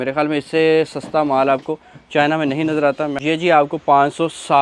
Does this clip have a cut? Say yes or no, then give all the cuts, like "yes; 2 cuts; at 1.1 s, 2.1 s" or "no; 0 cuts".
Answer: yes; 1 cut; at 3.2 s